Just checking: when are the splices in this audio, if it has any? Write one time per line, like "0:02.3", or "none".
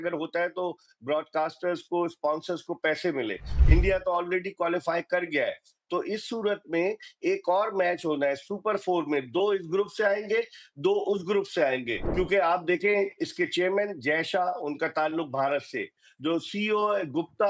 0:03.5
0:12.0